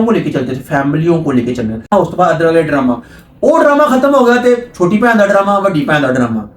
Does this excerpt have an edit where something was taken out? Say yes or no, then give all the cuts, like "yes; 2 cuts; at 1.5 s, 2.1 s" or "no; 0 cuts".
yes; 1 cut; at 1.9 s